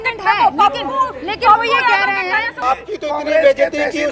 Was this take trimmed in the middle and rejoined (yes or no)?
yes